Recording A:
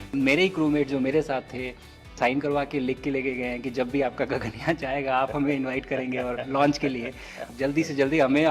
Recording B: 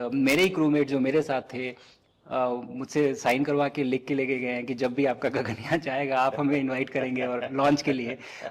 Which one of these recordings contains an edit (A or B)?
A